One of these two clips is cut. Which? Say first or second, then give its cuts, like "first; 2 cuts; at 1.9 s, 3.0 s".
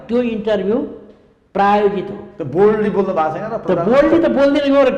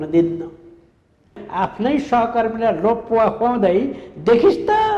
second; 1 cut; at 1.4 s